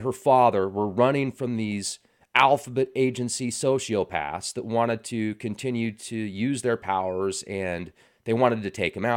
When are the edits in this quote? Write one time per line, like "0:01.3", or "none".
none